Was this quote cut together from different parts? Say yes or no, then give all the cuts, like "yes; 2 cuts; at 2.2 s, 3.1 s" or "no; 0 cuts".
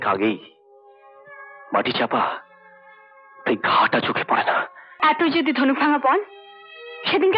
yes; 1 cut; at 4.8 s